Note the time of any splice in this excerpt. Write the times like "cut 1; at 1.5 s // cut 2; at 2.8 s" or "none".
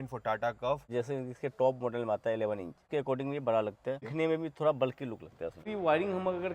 cut 1; at 0.9 s // cut 2; at 2.8 s // cut 3; at 4.1 s // cut 4; at 5.7 s